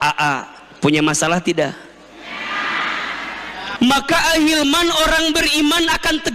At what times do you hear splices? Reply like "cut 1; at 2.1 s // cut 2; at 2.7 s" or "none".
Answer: cut 1; at 3.7 s

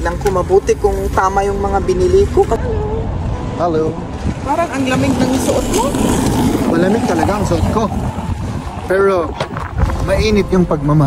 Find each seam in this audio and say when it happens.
cut 1; at 2.6 s

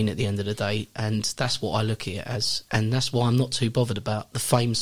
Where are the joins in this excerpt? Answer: cut 1; at 2.5 s

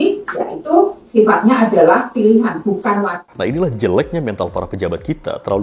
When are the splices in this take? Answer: cut 1; at 3.3 s

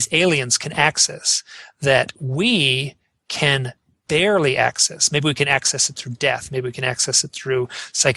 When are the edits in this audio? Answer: none

